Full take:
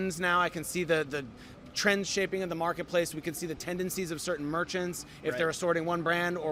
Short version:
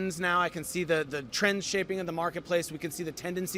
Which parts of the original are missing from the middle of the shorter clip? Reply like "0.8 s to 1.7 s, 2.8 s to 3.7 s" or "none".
1.3 s to 1.7 s